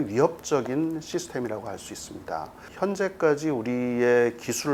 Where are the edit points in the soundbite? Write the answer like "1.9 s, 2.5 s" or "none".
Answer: none